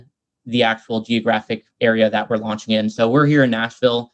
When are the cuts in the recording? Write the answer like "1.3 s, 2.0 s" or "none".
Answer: none